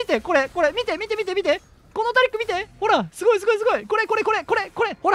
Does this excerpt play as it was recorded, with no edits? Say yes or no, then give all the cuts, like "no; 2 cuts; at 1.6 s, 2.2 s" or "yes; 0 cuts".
yes; 0 cuts